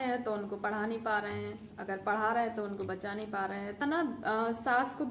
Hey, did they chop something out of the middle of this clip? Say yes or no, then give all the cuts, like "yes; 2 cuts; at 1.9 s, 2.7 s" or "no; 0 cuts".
yes; 1 cut; at 3.8 s